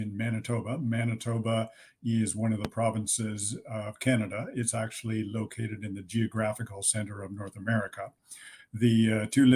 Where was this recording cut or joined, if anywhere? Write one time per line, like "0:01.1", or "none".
none